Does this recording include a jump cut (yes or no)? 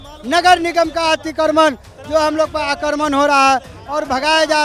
no